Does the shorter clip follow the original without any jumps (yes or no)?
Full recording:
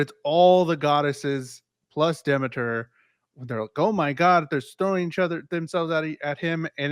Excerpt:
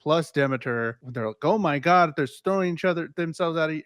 no